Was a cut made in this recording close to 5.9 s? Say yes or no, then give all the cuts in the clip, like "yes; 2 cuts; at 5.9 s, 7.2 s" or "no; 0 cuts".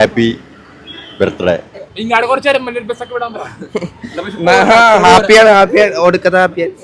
no; 1 cut; at 1.9 s